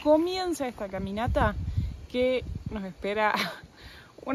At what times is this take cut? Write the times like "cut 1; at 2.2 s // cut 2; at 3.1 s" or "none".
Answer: none